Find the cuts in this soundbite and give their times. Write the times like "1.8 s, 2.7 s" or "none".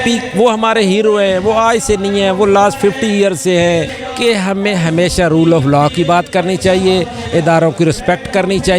4.0 s